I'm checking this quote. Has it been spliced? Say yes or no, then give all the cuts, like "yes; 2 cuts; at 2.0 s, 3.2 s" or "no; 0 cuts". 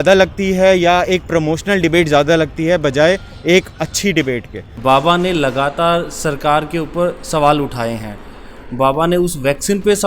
yes; 1 cut; at 4.6 s